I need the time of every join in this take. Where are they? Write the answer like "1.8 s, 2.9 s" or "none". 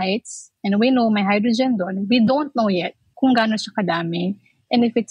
3.0 s